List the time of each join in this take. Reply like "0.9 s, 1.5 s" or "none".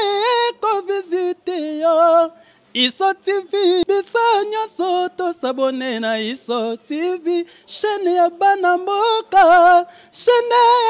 3.8 s

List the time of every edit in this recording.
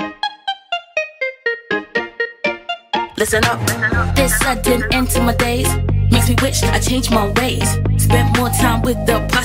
3.1 s

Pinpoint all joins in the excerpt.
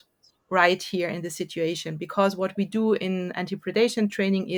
none

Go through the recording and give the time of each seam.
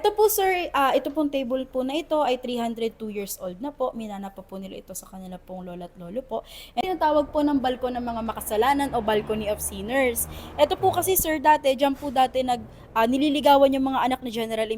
6.8 s

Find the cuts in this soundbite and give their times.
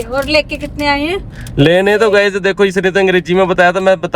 none

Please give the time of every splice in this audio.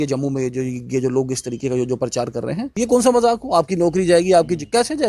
2.7 s

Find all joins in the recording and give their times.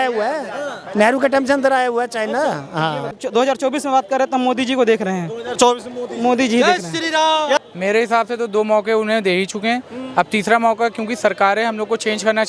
3.2 s, 7.6 s

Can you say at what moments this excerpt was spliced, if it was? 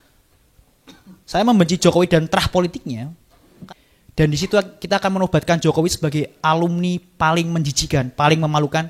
3.5 s

